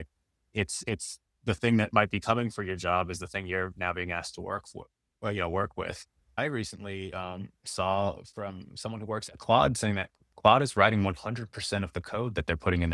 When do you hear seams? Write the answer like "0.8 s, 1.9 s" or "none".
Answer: 6.4 s